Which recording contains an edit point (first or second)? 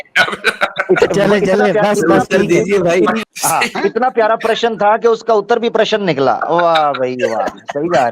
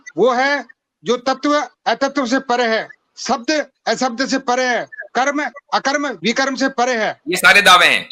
first